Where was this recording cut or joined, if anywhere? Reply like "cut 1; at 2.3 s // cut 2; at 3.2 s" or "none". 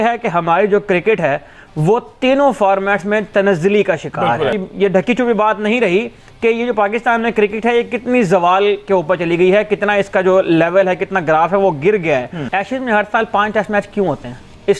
cut 1; at 4.7 s // cut 2; at 12.3 s